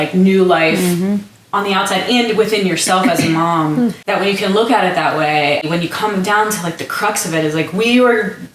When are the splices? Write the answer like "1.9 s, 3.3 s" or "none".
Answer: 4.0 s, 5.6 s